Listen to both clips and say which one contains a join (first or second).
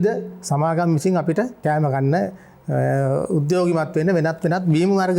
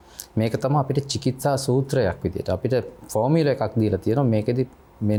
first